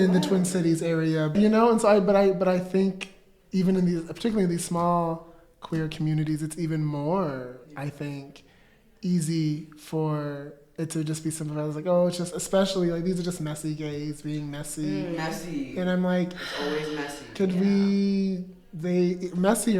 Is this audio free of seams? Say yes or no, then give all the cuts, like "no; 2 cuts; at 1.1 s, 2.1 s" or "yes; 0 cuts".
yes; 0 cuts